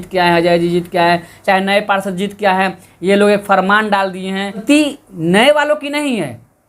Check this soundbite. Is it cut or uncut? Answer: cut